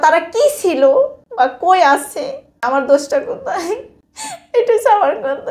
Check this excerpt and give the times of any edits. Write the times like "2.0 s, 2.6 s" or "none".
1.2 s, 2.6 s, 4.6 s